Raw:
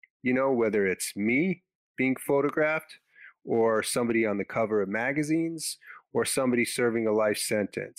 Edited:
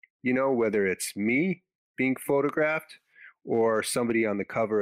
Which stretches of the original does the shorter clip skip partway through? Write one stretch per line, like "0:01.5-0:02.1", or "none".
none